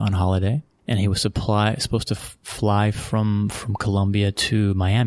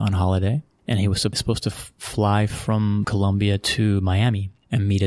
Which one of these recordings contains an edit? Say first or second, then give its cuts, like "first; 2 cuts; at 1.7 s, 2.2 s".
second; 2 cuts; at 1.4 s, 3.1 s